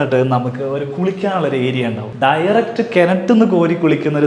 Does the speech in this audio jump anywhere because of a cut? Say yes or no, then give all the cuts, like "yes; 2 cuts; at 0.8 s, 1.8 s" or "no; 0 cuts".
yes; 1 cut; at 2.0 s